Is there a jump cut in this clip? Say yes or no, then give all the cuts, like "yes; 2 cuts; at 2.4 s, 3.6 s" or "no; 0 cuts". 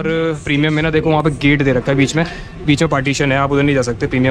no; 0 cuts